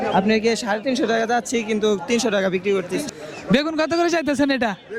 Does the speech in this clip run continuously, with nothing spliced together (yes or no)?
no